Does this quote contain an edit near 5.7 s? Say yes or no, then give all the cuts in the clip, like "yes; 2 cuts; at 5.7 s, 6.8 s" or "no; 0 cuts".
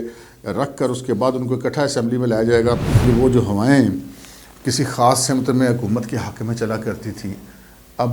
no; 1 cut; at 3.0 s